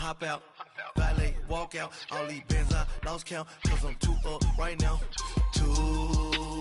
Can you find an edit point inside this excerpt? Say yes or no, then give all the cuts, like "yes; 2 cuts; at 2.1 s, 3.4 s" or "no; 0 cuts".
no; 0 cuts